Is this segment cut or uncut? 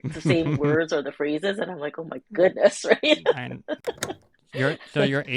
cut